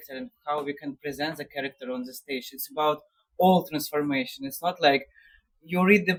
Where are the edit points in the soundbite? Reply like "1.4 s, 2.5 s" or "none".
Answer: none